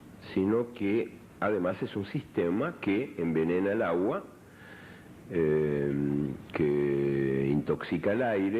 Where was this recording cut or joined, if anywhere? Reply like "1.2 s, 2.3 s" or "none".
none